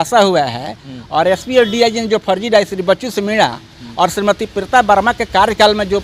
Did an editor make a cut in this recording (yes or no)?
no